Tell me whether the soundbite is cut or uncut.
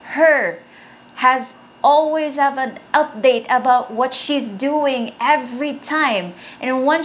uncut